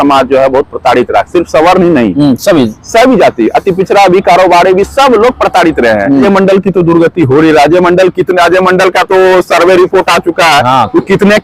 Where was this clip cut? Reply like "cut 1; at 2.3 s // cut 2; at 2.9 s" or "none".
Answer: cut 1; at 6.3 s